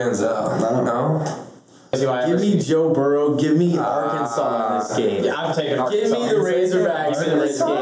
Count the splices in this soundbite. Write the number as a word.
one